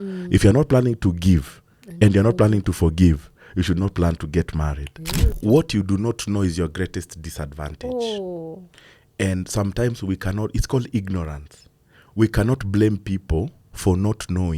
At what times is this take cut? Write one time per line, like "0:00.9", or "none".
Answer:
0:05.3